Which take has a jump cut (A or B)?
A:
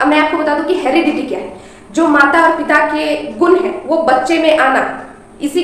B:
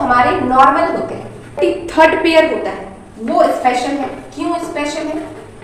B